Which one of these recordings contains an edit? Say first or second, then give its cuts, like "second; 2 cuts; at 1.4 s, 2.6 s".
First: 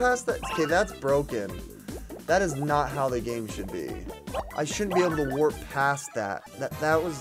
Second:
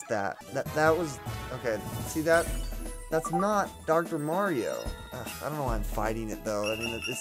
first; 1 cut; at 4.4 s